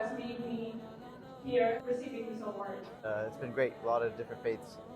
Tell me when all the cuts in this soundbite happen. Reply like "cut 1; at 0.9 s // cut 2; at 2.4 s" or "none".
cut 1; at 1.8 s // cut 2; at 3.0 s